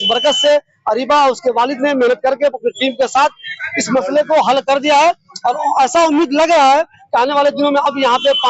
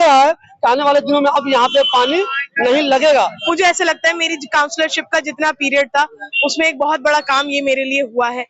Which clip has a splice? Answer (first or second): second